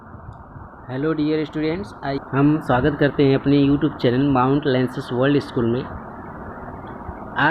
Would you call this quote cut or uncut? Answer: cut